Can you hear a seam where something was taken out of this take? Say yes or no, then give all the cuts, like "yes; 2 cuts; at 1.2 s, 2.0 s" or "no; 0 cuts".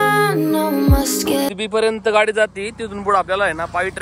yes; 1 cut; at 1.5 s